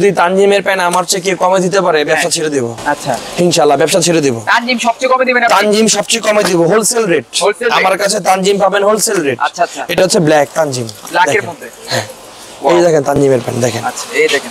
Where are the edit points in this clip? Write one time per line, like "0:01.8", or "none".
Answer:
none